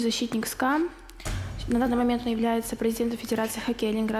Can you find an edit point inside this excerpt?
no; 0 cuts

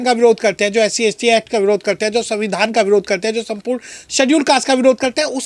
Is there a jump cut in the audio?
no; 0 cuts

